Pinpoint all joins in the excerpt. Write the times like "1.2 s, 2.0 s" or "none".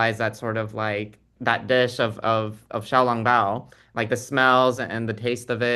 none